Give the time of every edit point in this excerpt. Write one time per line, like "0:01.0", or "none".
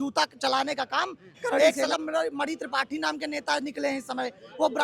0:01.6